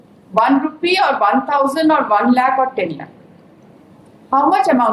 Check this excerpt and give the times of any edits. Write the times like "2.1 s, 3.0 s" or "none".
none